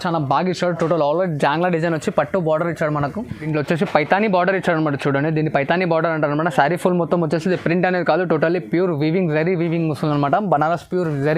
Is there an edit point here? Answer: yes; 1 cut; at 3.4 s

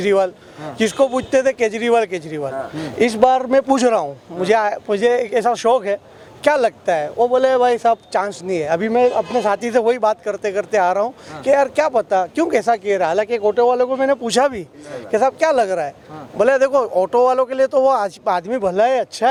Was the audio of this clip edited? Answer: no; 0 cuts

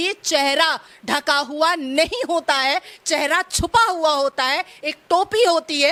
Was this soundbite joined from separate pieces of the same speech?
no; 0 cuts

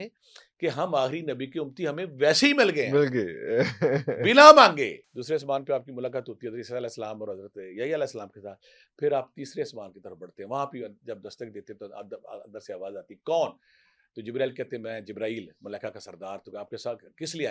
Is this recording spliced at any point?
yes; 1 cut; at 5.1 s

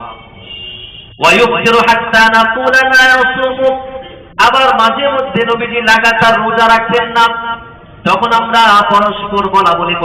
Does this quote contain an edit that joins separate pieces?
no; 0 cuts

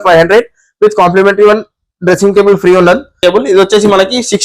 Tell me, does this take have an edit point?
yes; 1 cut; at 3.2 s

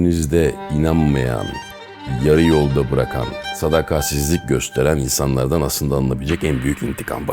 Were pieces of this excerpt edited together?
no; 0 cuts

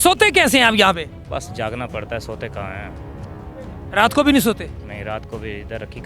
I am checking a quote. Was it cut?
no; 0 cuts

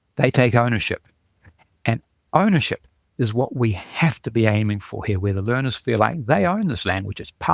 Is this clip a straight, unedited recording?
yes; 0 cuts

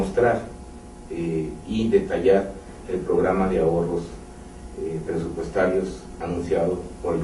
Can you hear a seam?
yes; 1 cut; at 5.1 s

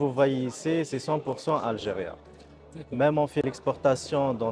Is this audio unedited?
no; 1 cut; at 3.4 s

